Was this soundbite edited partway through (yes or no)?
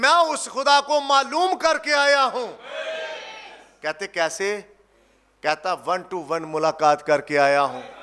no